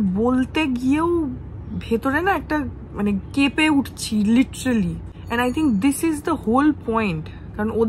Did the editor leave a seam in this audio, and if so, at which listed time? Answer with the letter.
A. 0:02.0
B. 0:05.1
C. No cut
B